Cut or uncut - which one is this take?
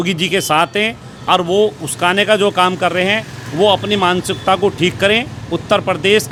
uncut